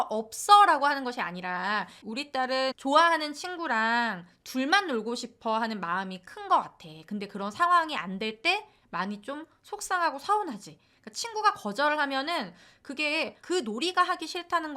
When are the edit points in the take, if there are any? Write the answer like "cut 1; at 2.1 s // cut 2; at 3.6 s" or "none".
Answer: cut 1; at 13.4 s